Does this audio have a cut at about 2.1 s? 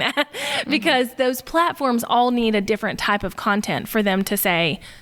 no; 0 cuts

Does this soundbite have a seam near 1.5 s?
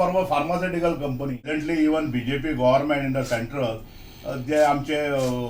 yes; 1 cut; at 1.5 s

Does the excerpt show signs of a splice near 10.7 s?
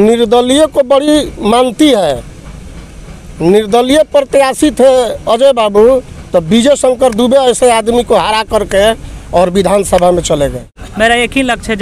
yes; 1 cut; at 10.7 s

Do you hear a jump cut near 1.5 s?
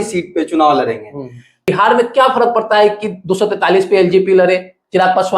yes; 1 cut; at 1.5 s

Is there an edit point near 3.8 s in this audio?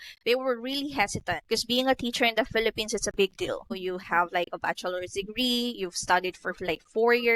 yes; 2 cuts; at 1.4 s, 3.8 s

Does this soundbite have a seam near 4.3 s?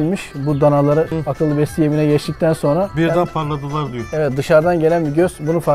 no; 2 cuts; at 1.1 s, 2.9 s

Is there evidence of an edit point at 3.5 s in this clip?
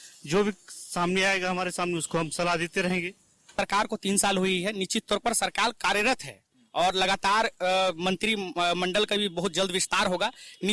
yes; 1 cut; at 3.5 s

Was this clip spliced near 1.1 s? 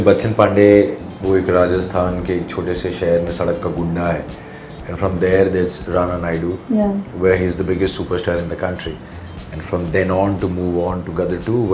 yes; 1 cut; at 1.1 s

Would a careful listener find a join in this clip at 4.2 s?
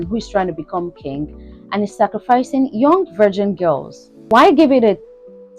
yes; 1 cut; at 4.2 s

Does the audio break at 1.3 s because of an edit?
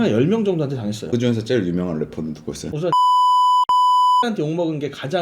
no; 1 cut; at 2.6 s

